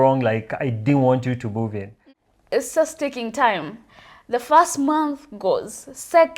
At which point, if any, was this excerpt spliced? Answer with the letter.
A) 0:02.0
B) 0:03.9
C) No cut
A